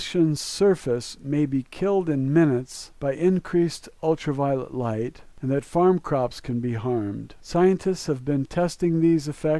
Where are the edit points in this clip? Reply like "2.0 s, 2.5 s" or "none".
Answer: none

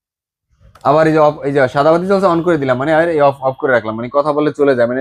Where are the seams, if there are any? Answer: none

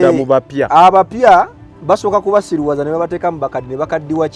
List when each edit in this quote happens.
none

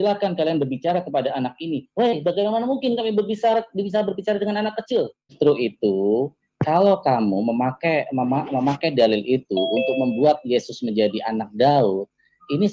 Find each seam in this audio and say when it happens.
5.3 s

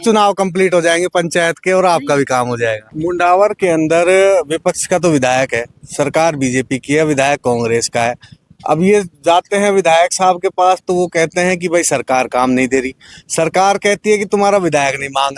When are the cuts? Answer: 2.9 s

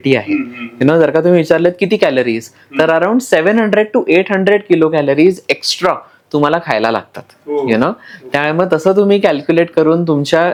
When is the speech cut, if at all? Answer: none

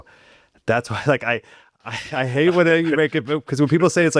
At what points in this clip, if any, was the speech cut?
none

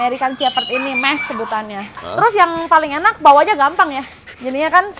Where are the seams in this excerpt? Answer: 2.1 s

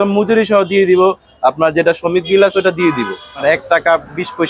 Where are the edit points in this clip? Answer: 3.4 s

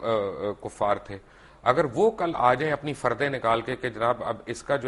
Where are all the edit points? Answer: none

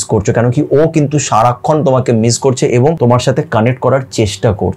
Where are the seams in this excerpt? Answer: 3.0 s

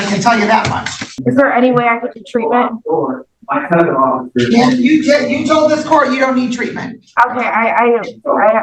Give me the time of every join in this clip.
1.2 s

